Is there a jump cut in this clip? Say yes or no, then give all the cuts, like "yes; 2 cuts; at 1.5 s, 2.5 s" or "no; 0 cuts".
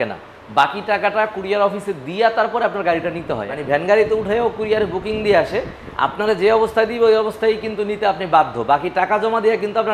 yes; 1 cut; at 3.5 s